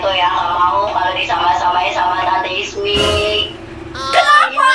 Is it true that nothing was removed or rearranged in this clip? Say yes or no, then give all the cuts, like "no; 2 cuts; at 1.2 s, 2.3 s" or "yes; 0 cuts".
yes; 0 cuts